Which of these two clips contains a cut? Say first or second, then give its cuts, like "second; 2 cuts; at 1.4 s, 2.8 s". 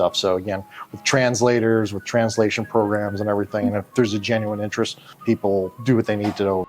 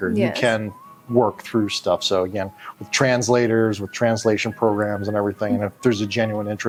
first; 1 cut; at 5.8 s